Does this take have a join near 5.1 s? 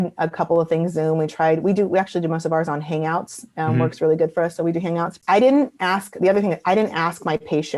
yes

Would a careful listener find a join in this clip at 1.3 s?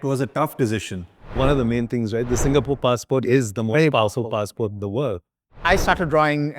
yes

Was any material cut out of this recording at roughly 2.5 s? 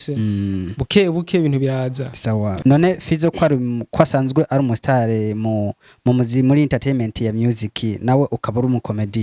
yes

